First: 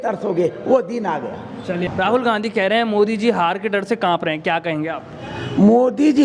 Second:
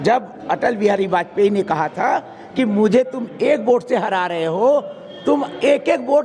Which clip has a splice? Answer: first; 1 cut; at 1.9 s

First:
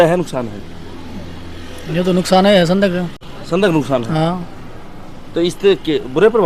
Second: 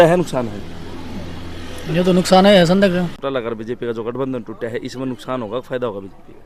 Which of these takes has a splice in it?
second; 1 cut; at 3.2 s

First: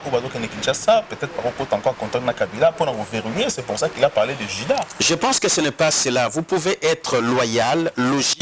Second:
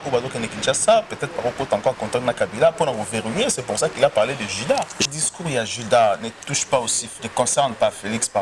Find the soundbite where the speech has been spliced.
second; 1 cut; at 5.0 s

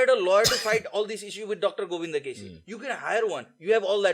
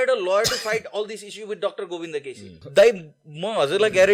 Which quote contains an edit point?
second; 1 cut; at 2.5 s

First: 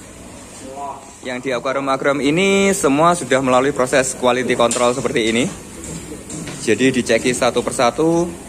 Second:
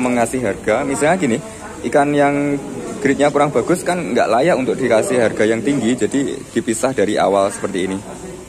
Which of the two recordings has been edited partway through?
first; 1 cut; at 1.1 s

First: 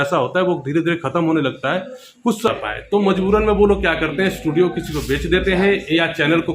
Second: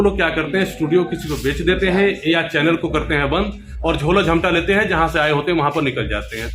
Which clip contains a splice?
first; 1 cut; at 2.5 s

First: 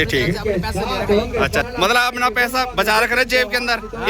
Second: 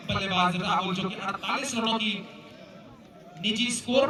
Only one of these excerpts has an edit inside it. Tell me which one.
first; 1 cut; at 1.7 s

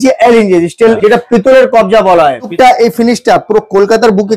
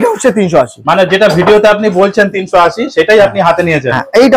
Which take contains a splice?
first; 2 cuts; at 1.0 s, 2.5 s

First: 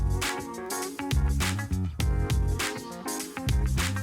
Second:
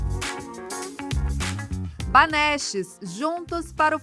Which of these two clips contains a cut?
first; 1 cut; at 1.7 s

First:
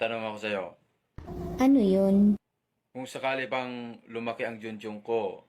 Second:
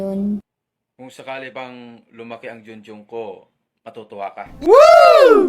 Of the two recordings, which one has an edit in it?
second; 1 cut; at 4.6 s

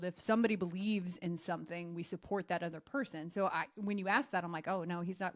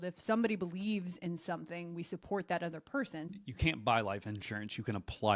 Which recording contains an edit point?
second; 1 cut; at 3.3 s

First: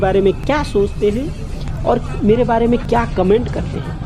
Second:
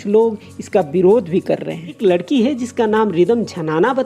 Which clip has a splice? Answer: second; 1 cut; at 2.0 s

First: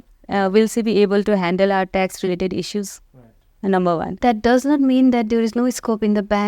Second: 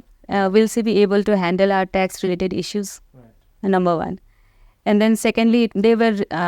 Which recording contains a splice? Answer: first; 1 cut; at 4.2 s

